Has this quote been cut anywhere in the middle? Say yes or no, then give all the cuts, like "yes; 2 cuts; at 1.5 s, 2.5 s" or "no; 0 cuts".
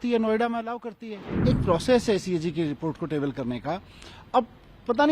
yes; 1 cut; at 1.4 s